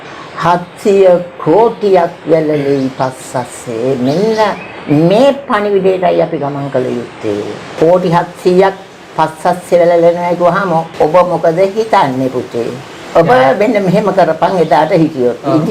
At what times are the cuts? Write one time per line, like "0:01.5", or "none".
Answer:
0:07.7
0:10.9
0:12.9